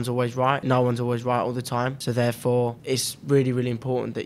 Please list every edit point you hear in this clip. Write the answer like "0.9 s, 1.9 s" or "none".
0.7 s, 2.0 s, 2.8 s